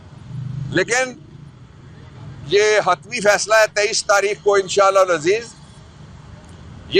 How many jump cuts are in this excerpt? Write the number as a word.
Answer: zero